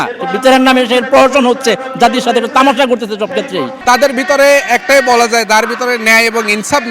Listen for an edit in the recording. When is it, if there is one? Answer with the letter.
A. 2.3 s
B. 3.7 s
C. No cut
B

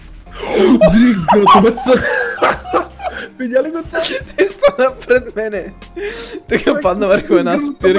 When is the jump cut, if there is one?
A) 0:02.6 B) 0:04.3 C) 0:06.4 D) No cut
D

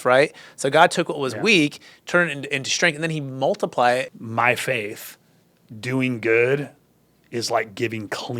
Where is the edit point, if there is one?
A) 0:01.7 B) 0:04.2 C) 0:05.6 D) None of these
B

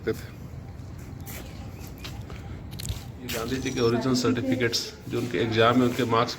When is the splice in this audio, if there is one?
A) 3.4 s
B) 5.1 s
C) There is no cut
A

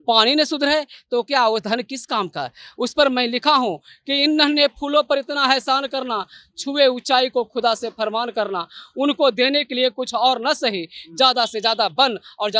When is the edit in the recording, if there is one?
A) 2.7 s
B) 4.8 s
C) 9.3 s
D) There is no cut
D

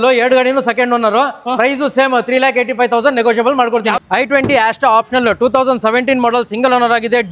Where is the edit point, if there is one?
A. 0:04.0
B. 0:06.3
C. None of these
A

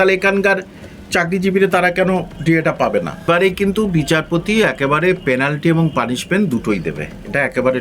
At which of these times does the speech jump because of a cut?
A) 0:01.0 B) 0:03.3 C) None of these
B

